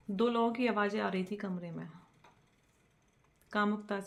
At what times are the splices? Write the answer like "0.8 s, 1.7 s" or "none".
none